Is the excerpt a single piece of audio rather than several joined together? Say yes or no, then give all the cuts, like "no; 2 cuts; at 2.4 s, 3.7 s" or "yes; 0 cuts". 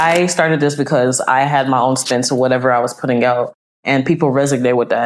yes; 0 cuts